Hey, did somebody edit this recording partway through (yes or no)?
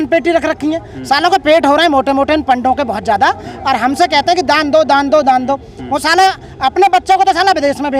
no